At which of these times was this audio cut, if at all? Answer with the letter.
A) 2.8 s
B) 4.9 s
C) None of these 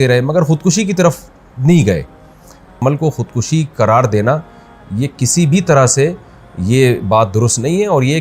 A